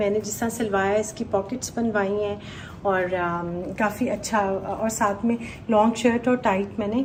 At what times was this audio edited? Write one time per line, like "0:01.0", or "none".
none